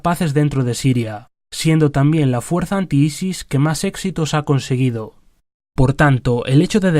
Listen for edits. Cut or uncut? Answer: cut